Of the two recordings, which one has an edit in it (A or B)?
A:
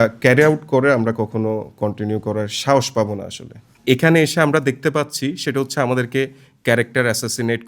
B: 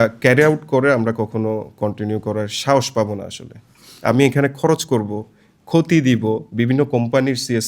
A